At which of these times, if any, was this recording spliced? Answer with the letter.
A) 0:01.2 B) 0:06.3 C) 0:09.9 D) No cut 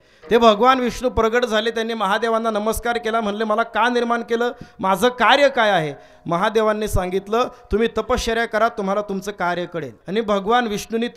C